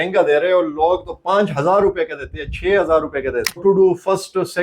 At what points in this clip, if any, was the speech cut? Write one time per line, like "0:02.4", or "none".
0:03.6